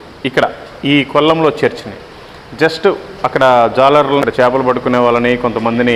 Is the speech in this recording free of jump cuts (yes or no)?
no